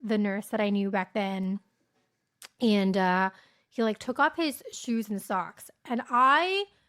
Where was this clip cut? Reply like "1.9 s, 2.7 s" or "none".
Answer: none